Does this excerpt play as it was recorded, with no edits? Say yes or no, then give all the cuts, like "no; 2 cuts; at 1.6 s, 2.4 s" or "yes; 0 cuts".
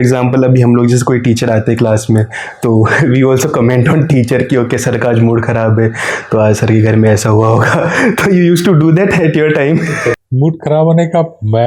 no; 1 cut; at 10.2 s